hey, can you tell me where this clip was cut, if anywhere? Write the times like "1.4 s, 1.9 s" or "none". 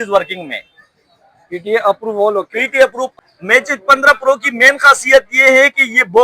3.0 s